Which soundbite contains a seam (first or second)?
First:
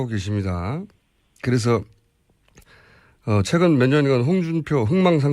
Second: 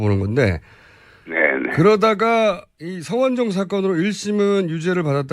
first